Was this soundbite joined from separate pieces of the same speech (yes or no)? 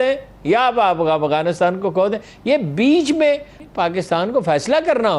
yes